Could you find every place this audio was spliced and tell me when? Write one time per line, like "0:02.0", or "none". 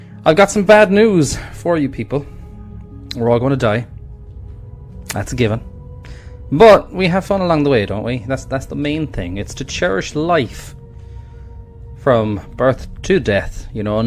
none